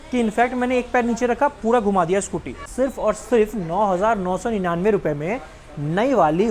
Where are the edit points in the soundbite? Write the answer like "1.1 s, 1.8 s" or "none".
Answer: 2.6 s